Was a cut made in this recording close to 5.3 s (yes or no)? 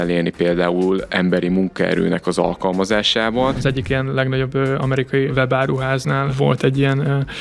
yes